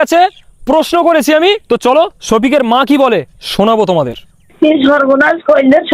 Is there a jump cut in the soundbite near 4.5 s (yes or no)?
yes